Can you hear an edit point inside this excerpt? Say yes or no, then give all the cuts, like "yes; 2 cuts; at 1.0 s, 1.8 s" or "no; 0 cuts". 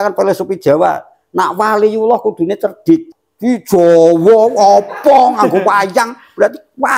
yes; 1 cut; at 3.2 s